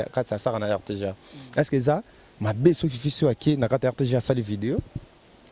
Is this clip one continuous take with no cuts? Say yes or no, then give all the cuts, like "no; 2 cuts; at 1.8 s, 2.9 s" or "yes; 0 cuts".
yes; 0 cuts